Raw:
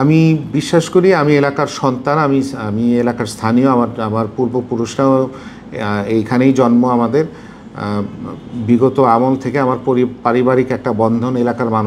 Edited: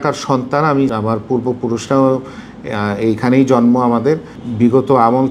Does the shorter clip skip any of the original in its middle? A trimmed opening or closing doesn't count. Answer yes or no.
yes